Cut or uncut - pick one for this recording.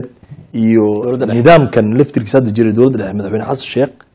uncut